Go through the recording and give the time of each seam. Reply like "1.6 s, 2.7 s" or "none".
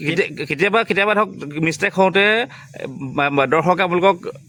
none

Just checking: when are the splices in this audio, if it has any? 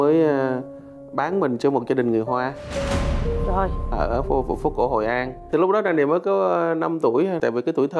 5.5 s

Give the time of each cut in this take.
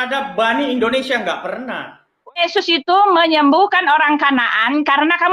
2.4 s

